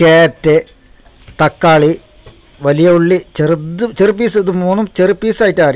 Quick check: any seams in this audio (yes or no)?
yes